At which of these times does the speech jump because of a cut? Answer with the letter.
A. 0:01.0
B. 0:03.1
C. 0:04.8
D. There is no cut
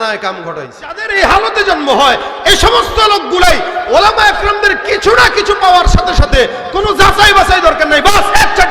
A